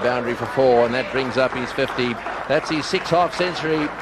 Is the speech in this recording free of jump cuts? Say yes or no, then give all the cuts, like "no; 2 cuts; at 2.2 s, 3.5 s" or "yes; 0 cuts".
yes; 0 cuts